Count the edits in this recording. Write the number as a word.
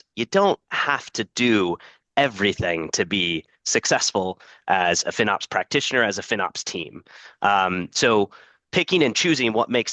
zero